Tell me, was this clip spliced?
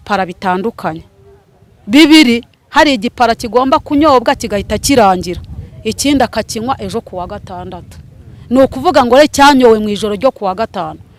no; 0 cuts

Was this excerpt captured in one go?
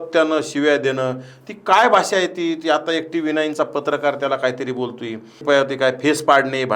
no; 1 cut; at 5.4 s

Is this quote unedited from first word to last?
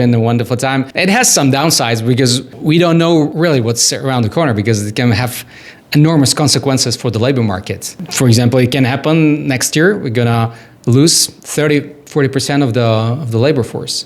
no; 2 cuts; at 0.9 s, 3.3 s

